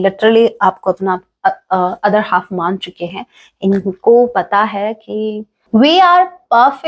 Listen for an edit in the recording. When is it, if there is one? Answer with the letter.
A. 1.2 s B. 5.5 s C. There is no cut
B